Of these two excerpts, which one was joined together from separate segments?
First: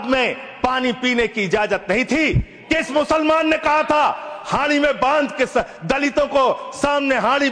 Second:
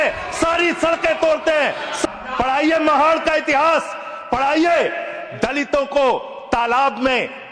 second; 1 cut; at 2.0 s

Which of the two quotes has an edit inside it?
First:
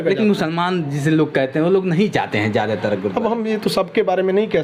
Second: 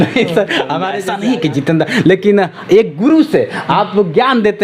second; 1 cut; at 1.0 s

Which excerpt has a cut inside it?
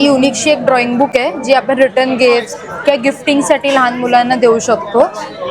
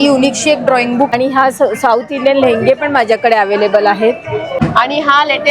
second; 2 cuts; at 1.1 s, 4.6 s

